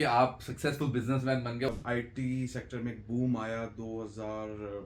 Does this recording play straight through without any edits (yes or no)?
no